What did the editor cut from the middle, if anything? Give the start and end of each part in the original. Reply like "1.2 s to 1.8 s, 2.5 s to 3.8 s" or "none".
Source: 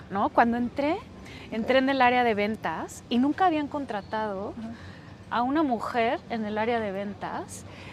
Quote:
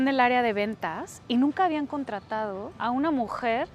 4.5 s to 5.2 s